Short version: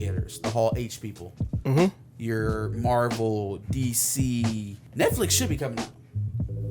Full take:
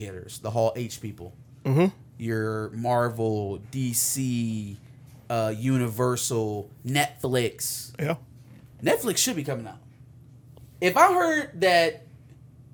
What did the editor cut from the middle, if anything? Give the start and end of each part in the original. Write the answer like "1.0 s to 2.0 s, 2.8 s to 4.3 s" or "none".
4.8 s to 8.6 s